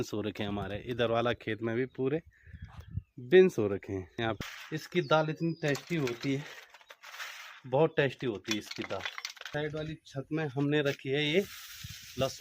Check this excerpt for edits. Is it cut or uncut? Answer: cut